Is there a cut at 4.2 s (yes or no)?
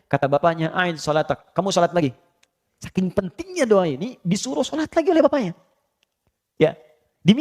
no